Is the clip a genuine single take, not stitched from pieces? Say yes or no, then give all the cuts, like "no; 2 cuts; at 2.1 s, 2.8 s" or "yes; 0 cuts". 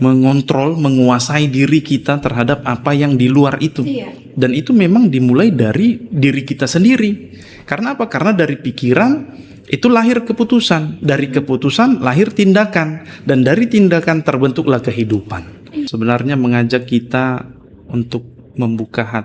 no; 1 cut; at 15.9 s